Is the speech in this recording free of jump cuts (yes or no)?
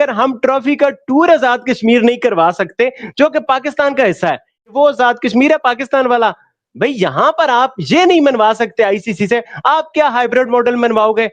no